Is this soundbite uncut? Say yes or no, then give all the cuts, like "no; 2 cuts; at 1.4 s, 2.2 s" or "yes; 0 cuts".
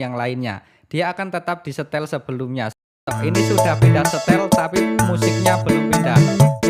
no; 1 cut; at 3.1 s